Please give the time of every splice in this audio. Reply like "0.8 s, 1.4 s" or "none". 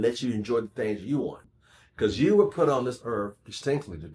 1.4 s